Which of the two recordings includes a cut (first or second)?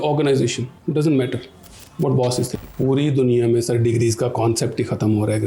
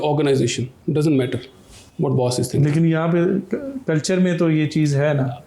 first